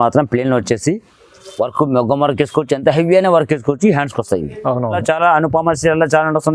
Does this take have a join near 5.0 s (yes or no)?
yes